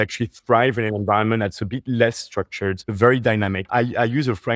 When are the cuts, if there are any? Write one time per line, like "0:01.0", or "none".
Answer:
0:02.9
0:03.6